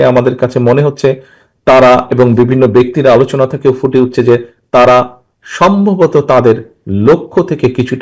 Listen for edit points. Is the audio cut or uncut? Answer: uncut